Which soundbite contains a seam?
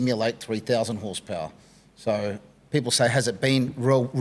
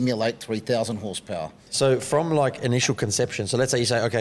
second; 1 cut; at 1.6 s

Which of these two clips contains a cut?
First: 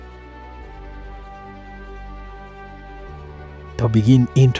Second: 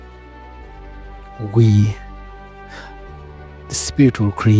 second; 3 cuts; at 1.4 s, 1.9 s, 3.7 s

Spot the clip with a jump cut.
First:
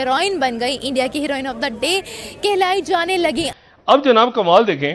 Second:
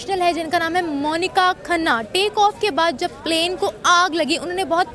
first; 1 cut; at 3.5 s

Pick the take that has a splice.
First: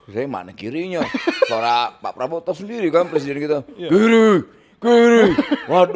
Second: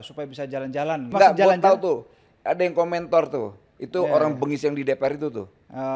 second; 1 cut; at 1.1 s

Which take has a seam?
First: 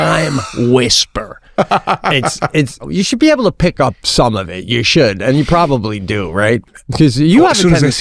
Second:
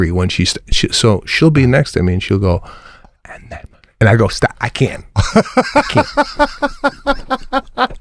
first; 2 cuts; at 2.9 s, 6.6 s

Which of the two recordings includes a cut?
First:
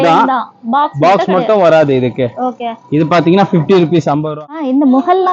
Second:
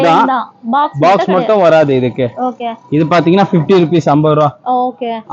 first; 1 cut; at 4.2 s

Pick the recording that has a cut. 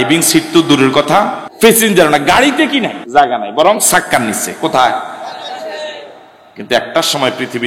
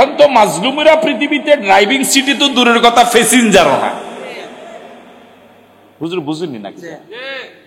first; 2 cuts; at 1.4 s, 3.0 s

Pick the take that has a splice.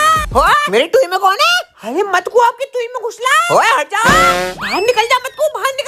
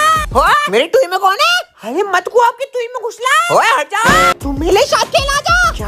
second; 1 cut; at 4.4 s

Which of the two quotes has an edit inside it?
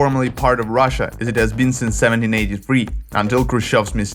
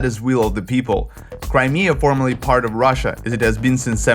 second; 1 cut; at 1.2 s

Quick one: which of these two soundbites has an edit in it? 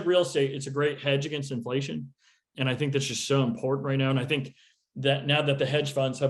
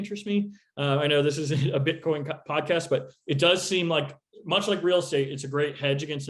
first; 1 cut; at 2.5 s

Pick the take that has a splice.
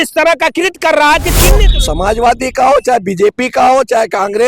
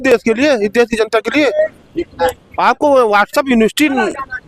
first; 1 cut; at 1.6 s

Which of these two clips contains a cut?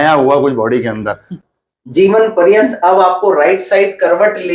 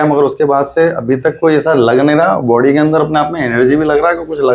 first; 1 cut; at 1.4 s

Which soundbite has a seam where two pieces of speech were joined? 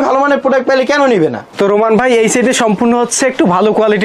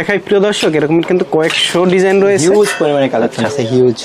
first; 1 cut; at 1.4 s

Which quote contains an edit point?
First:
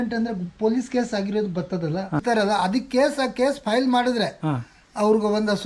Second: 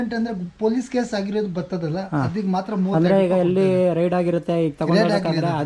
first; 1 cut; at 2.2 s

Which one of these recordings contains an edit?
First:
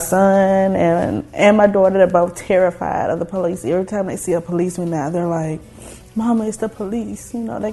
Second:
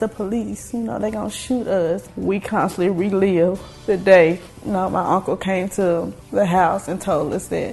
second; 4 cuts; at 2.1 s, 3.7 s, 4.5 s, 6.2 s

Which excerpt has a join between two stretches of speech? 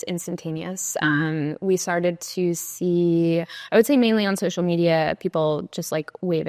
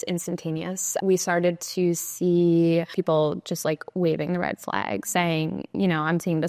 second; 2 cuts; at 1.0 s, 3.0 s

